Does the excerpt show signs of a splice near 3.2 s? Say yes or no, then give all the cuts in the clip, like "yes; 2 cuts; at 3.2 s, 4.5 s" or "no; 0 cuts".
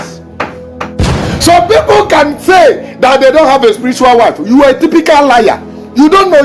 no; 1 cut; at 1.1 s